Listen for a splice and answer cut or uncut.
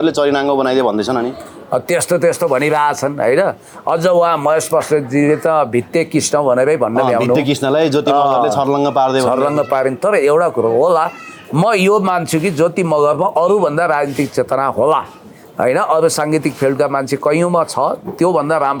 uncut